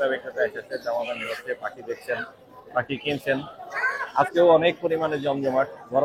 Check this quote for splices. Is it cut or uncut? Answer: uncut